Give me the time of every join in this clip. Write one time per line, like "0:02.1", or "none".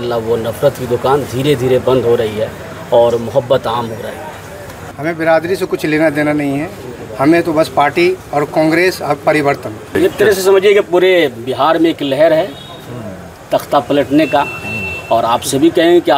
0:04.8
0:09.8